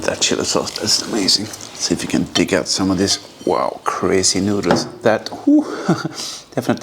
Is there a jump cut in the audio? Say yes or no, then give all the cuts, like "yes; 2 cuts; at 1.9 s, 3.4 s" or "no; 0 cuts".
no; 0 cuts